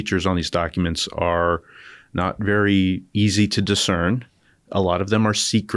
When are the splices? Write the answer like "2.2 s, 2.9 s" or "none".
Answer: none